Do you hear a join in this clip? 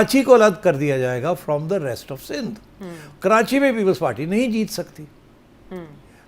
no; 0 cuts

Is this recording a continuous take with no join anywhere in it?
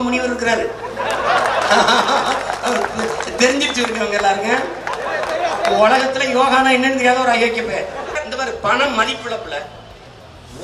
no; 1 cut; at 8.2 s

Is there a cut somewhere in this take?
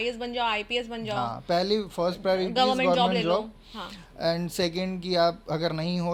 no; 0 cuts

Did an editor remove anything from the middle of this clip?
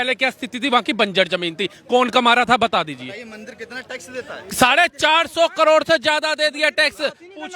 no; 0 cuts

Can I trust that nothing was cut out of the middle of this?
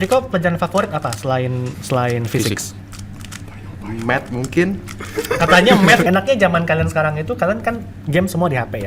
no; 2 cuts; at 1.7 s, 6.0 s

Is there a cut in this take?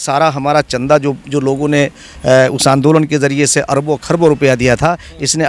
no; 0 cuts

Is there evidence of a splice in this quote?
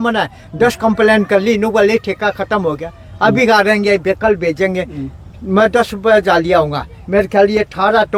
no; 0 cuts

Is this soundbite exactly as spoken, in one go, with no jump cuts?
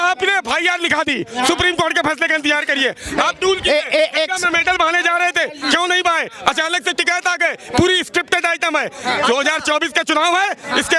yes; 0 cuts

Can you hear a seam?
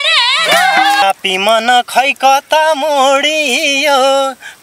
yes; 1 cut; at 1.0 s

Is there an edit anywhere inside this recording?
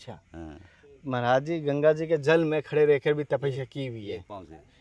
no; 0 cuts

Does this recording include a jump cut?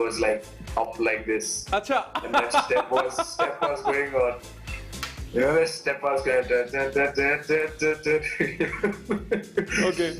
no; 0 cuts

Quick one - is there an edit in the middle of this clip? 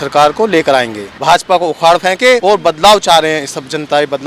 yes; 2 cuts; at 1.1 s, 2.4 s

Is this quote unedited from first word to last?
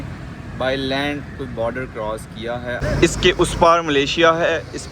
no; 1 cut; at 2.8 s

